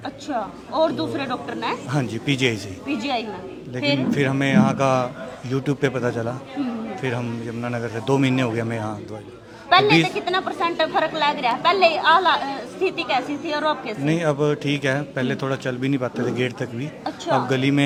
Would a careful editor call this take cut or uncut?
uncut